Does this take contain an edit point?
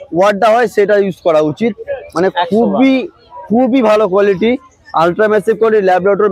no; 0 cuts

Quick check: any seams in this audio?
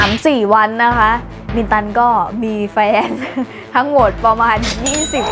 no; 0 cuts

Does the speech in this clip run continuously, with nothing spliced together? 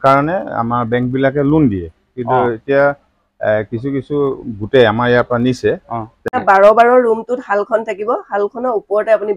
no; 1 cut; at 6.2 s

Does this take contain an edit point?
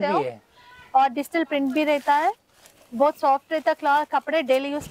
no; 0 cuts

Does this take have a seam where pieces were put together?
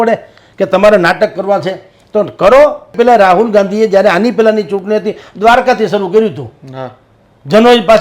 yes; 1 cut; at 2.9 s

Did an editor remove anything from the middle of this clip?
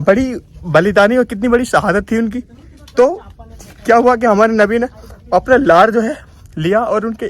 no; 0 cuts

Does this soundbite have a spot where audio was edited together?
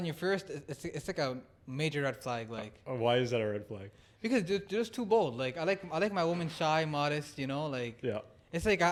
no; 0 cuts

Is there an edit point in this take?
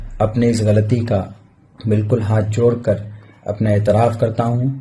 no; 0 cuts

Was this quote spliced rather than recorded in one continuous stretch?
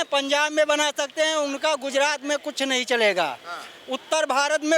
no; 0 cuts

